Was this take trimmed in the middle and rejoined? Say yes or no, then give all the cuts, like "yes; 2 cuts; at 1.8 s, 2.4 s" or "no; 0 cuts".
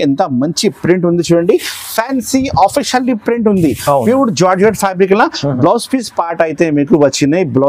no; 0 cuts